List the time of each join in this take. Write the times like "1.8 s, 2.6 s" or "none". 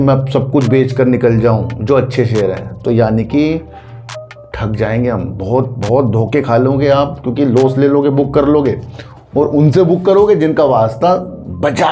none